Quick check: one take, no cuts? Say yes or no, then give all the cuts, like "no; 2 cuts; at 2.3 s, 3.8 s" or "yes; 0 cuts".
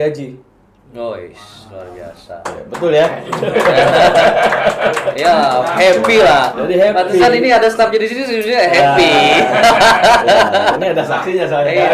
yes; 0 cuts